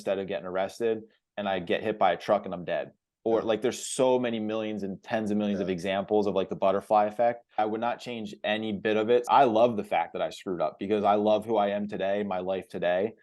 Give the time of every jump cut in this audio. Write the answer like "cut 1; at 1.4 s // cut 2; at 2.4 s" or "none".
cut 1; at 7.6 s // cut 2; at 9.2 s